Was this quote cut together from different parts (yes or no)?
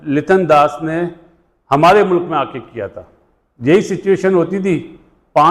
no